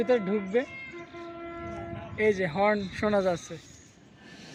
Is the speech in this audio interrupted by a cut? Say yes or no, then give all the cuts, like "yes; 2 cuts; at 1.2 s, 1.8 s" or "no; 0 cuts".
no; 0 cuts